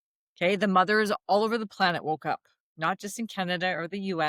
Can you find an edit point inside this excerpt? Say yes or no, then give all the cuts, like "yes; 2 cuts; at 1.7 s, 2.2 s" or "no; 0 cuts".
no; 0 cuts